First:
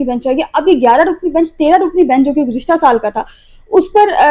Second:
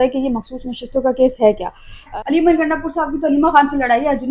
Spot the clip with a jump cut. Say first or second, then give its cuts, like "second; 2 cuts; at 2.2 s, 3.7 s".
second; 1 cut; at 2.1 s